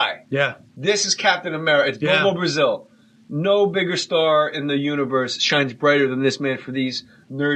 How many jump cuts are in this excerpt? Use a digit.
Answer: 0